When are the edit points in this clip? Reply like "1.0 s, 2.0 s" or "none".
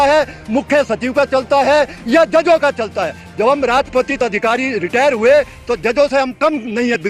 none